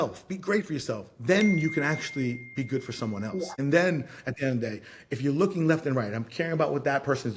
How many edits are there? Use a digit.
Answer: 1